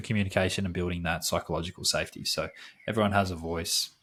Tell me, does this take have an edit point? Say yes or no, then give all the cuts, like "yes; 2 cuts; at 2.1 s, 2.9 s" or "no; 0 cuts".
no; 0 cuts